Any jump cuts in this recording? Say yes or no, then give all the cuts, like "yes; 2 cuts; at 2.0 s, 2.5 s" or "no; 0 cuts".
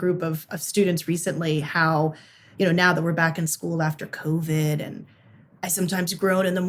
no; 0 cuts